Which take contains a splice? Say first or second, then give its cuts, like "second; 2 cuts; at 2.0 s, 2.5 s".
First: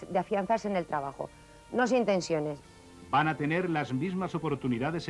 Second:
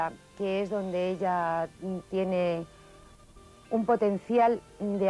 first; 1 cut; at 2.7 s